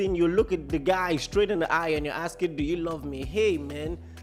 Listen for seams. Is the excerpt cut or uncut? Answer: uncut